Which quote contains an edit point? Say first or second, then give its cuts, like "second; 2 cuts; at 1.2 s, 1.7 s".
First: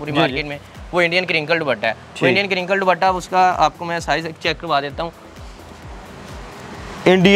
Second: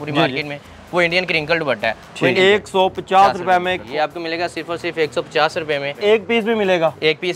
second; 3 cuts; at 2.3 s, 3.9 s, 6.0 s